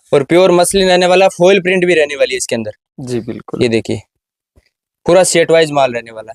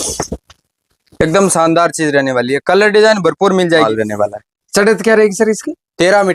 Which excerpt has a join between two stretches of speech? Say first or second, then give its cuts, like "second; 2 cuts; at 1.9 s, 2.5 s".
second; 1 cut; at 3.8 s